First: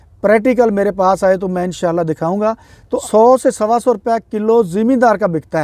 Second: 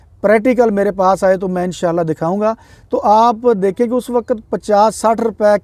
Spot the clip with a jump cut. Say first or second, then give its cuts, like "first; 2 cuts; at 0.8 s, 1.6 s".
first; 1 cut; at 3.0 s